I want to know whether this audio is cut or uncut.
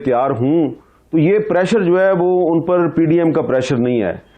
uncut